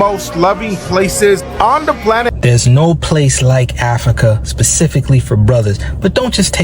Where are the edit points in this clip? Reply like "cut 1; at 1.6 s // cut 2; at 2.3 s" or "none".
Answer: cut 1; at 2.3 s